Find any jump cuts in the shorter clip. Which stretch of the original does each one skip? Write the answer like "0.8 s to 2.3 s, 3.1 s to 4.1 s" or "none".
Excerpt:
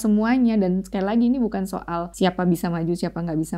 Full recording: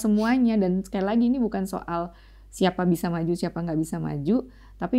2.1 s to 2.5 s